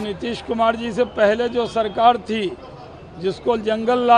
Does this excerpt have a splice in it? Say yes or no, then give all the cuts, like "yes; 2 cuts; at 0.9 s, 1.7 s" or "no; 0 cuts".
no; 0 cuts